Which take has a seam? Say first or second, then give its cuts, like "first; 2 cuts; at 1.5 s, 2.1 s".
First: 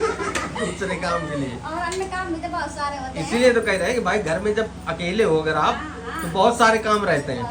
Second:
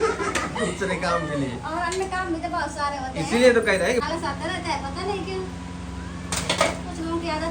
second; 1 cut; at 4.0 s